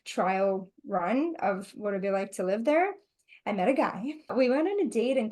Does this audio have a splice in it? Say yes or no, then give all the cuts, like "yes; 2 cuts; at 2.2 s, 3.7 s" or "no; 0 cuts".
yes; 1 cut; at 4.3 s